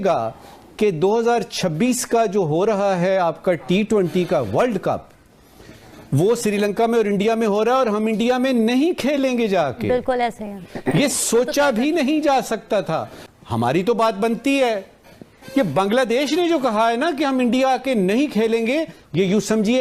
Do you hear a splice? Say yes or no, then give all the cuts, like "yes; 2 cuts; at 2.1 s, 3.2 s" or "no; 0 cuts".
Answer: no; 0 cuts